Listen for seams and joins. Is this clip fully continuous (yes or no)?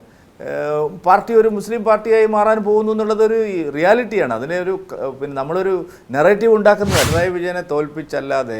no